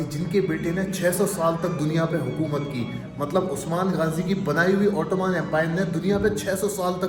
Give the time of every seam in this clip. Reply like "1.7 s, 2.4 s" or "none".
none